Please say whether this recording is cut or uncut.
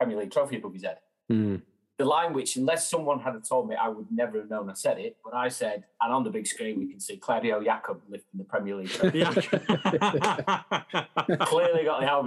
uncut